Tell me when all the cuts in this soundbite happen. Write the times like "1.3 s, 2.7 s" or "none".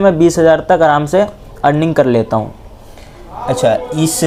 none